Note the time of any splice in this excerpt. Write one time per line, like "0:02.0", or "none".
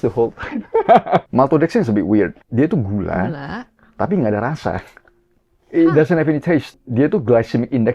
0:01.3
0:02.4
0:06.7